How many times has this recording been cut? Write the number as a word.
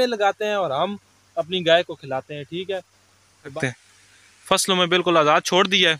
one